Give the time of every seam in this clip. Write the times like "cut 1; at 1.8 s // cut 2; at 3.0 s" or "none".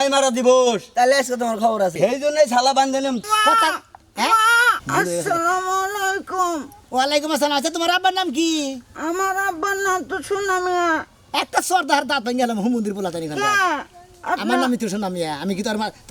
cut 1; at 2.0 s // cut 2; at 3.2 s // cut 3; at 4.8 s